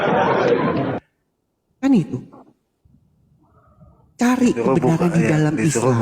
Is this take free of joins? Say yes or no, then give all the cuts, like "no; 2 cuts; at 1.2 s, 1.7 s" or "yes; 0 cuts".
no; 1 cut; at 1.0 s